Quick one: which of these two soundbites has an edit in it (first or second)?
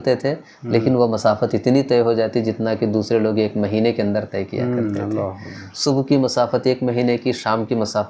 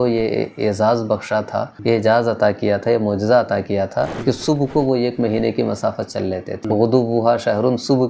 second